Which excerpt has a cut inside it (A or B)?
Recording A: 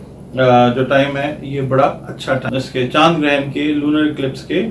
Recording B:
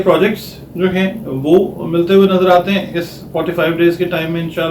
A